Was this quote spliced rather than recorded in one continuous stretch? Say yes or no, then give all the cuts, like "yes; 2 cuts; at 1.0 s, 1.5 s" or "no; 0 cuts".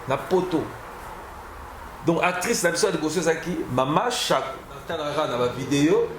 yes; 1 cut; at 4.9 s